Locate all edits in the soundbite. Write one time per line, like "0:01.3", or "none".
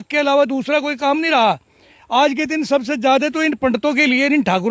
none

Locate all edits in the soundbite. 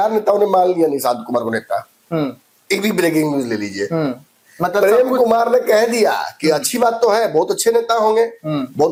none

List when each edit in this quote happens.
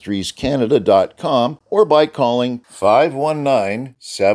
0:01.6

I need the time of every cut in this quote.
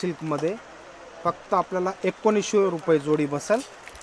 none

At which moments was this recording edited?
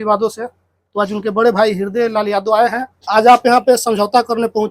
0:02.9

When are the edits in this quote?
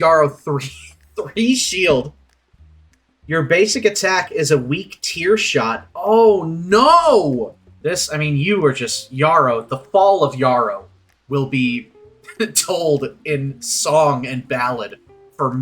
0:07.6

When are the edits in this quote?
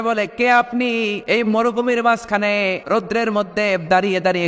0:01.2
0:02.8

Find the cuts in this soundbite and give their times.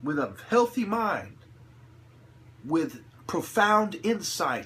0:01.2

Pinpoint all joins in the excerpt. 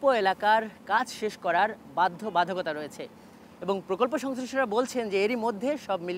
none

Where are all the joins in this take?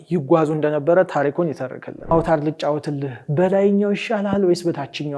0:02.1

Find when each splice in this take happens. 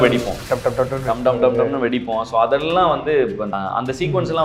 0:03.5

